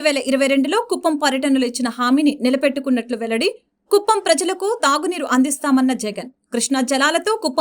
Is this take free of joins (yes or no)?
yes